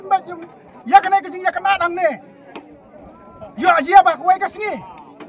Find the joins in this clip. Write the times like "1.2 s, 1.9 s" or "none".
none